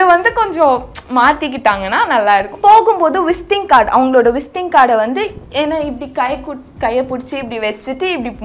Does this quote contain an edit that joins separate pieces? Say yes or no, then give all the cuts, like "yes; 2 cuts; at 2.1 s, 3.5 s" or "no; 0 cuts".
yes; 1 cut; at 2.6 s